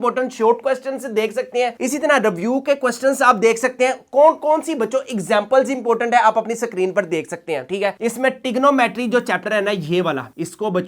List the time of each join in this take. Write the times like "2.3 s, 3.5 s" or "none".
8.0 s